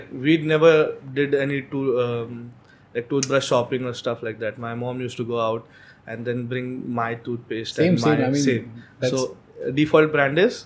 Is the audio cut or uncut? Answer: uncut